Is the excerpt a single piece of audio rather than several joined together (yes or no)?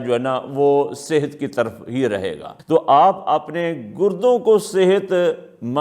no